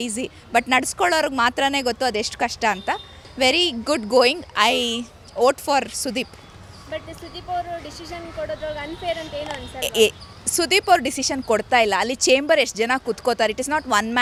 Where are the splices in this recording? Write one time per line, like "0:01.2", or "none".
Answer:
none